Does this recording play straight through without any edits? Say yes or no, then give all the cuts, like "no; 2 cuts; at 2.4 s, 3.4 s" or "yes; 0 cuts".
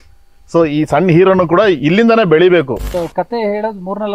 no; 1 cut; at 2.9 s